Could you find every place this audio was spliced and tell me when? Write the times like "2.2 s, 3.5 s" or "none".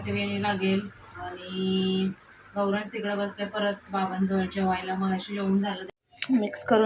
5.8 s